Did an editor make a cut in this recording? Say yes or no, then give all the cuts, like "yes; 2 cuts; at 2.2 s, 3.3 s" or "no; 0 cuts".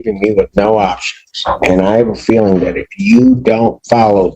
no; 0 cuts